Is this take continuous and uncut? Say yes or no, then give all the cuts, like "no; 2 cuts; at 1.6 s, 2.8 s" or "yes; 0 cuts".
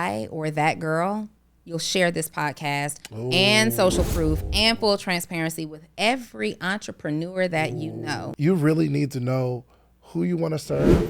no; 1 cut; at 8.2 s